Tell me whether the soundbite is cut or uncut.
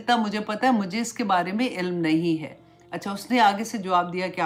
uncut